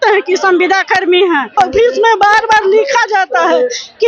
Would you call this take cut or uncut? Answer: cut